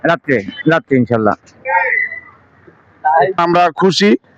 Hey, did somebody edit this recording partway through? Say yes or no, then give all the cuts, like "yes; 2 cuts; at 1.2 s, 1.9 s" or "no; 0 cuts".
yes; 1 cut; at 3.4 s